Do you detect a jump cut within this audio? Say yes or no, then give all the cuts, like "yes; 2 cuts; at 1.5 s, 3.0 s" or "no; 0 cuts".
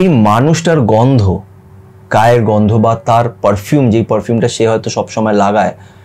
no; 0 cuts